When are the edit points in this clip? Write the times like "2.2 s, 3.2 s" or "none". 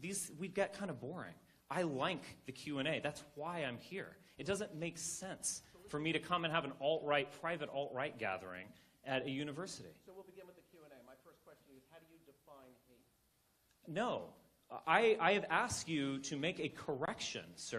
8.5 s